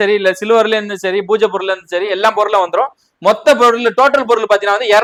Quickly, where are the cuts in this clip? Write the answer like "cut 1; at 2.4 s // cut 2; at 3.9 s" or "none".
none